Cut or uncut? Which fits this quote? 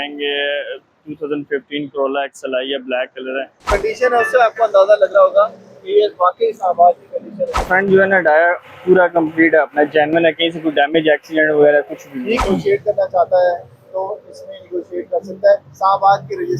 cut